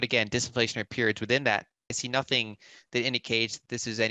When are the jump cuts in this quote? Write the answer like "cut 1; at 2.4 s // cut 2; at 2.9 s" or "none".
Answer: cut 1; at 2.0 s